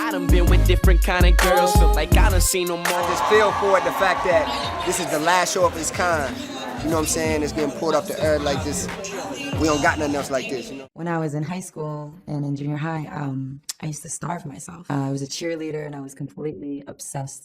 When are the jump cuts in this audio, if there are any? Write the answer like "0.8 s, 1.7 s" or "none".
3.1 s, 10.7 s